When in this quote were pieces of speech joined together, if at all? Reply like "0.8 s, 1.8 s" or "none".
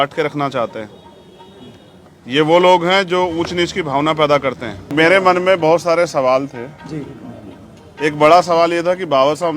4.9 s